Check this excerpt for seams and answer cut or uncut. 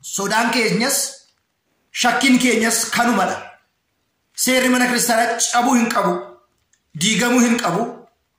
uncut